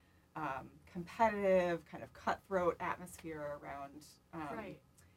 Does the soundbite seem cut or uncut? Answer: uncut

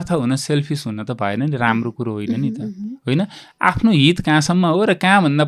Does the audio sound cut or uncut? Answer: uncut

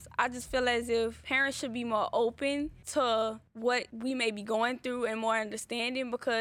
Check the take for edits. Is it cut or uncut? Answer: cut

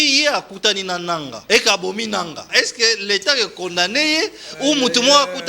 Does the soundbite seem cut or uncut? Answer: cut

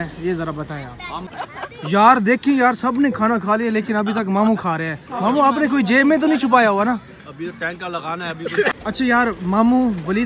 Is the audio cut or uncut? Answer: cut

